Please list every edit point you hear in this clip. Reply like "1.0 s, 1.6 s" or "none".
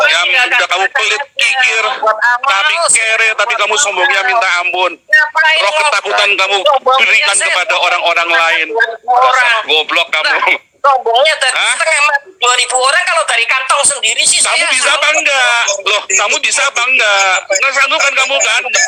none